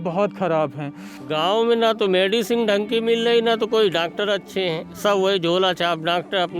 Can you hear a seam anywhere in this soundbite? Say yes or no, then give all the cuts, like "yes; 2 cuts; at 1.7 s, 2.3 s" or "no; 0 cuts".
yes; 1 cut; at 1.2 s